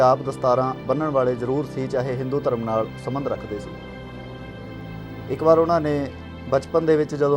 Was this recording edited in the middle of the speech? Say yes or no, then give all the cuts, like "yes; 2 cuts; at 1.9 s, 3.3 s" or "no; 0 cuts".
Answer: no; 0 cuts